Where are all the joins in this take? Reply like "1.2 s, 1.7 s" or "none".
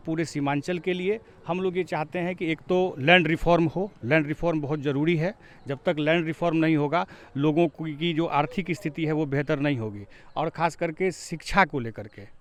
none